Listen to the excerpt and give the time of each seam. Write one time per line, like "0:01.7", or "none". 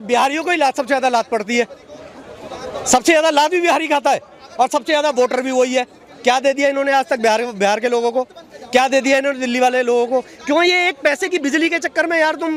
none